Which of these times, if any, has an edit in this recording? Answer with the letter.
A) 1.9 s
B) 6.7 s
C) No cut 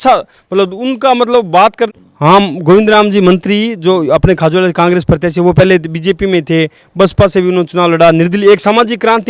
A